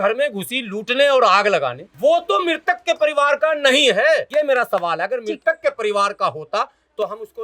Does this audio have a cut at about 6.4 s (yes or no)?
no